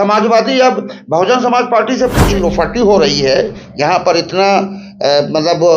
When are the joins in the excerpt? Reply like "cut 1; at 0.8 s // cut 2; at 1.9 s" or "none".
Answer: cut 1; at 2.2 s